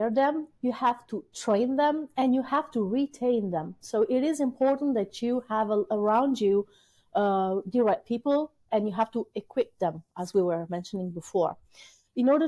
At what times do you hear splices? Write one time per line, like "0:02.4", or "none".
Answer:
none